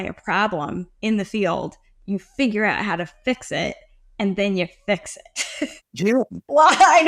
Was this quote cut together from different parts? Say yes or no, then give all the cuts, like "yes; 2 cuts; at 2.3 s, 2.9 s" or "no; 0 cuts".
yes; 1 cut; at 5.8 s